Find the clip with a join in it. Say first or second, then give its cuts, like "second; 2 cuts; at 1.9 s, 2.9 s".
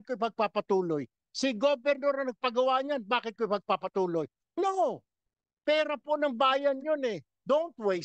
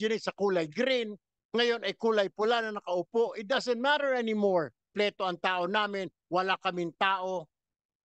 second; 1 cut; at 4.9 s